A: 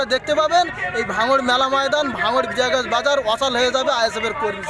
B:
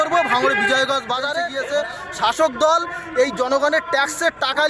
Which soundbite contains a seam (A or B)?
B